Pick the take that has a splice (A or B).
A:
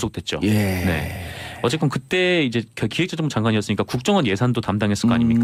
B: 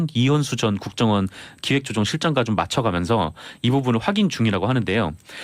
B